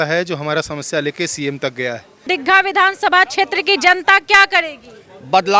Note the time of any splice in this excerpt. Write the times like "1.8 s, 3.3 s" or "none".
2.2 s